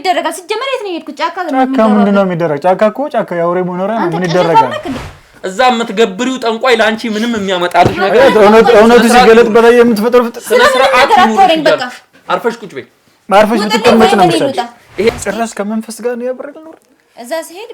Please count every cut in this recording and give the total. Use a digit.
2